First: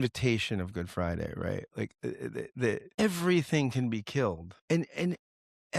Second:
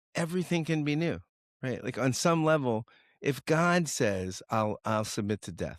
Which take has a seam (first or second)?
first